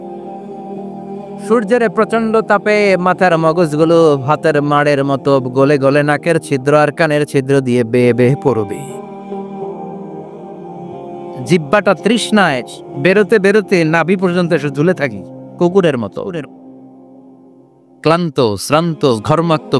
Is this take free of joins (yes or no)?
no